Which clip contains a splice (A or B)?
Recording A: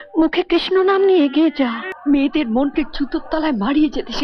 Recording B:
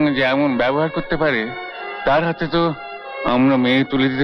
A